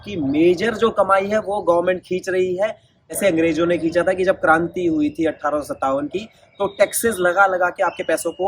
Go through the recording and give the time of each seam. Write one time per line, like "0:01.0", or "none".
0:03.1